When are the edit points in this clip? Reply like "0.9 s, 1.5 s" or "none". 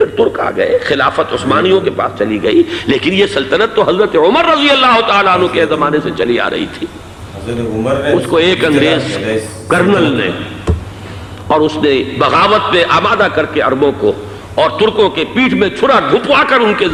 none